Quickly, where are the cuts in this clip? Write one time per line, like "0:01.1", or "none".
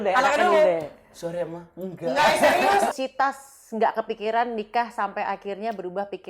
0:02.9